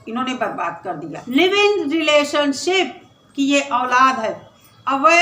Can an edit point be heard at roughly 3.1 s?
no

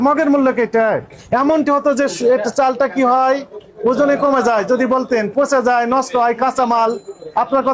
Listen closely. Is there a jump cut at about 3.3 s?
no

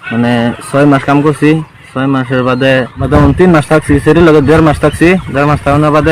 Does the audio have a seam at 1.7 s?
no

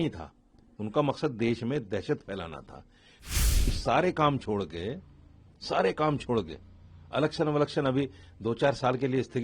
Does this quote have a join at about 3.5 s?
yes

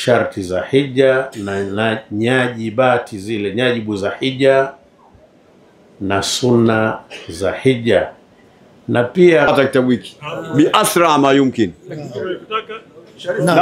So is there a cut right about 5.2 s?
no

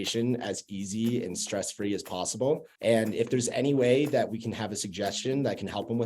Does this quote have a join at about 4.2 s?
no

